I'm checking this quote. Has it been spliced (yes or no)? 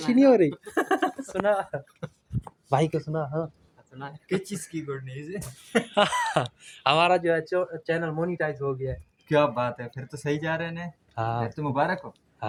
no